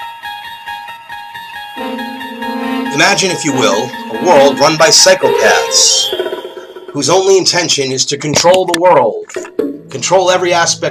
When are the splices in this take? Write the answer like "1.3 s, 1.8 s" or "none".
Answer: 8.1 s

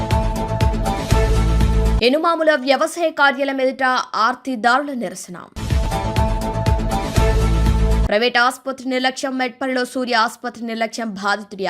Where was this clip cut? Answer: 2.0 s

